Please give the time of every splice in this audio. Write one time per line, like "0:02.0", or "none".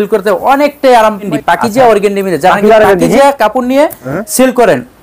0:01.2